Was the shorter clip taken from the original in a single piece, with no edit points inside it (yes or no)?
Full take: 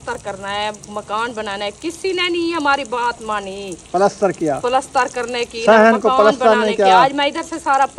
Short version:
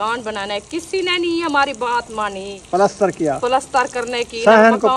no